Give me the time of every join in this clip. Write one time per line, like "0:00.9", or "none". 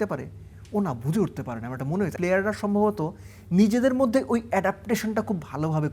0:02.1